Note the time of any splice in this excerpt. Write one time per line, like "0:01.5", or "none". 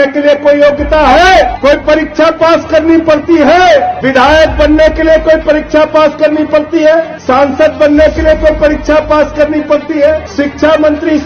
0:01.5
0:04.0
0:07.2
0:10.3